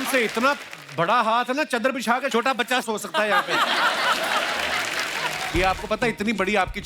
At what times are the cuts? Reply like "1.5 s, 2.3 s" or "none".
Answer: 5.4 s